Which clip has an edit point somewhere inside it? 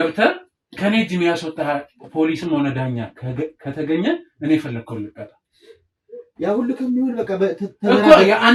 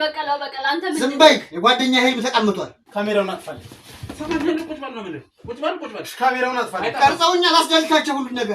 second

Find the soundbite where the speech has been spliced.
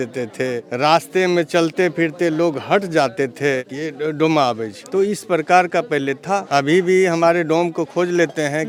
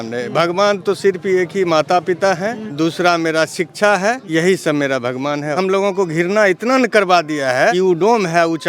second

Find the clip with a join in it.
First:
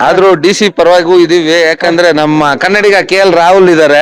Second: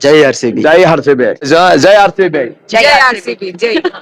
second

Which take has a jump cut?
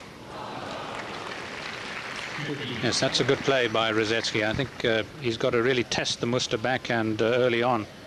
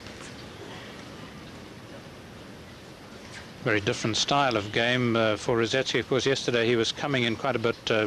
first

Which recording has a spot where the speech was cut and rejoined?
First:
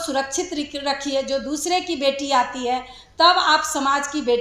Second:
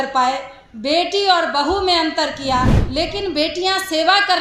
second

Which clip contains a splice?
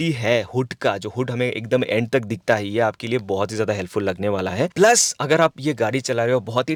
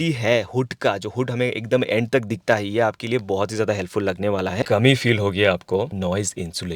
second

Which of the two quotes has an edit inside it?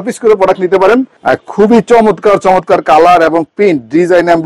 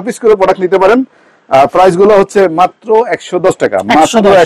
first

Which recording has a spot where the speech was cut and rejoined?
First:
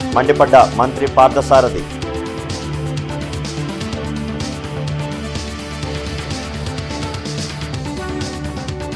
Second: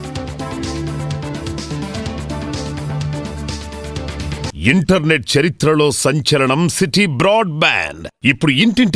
second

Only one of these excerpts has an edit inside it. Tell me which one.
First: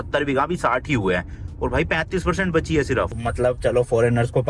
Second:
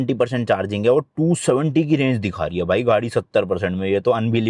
first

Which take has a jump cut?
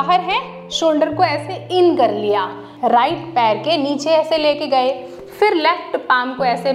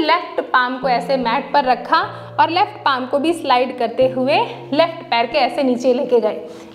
first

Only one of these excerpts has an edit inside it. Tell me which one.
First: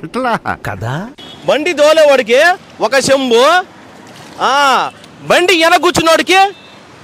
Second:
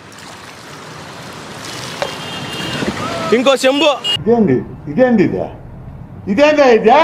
first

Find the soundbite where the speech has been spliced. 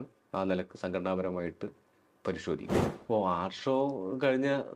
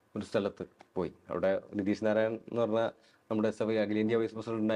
first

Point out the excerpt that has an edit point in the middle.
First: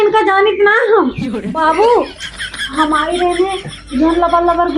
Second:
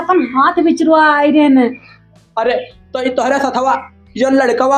first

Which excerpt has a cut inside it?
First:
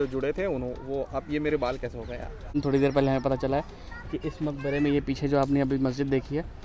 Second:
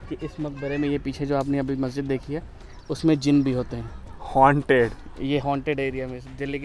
first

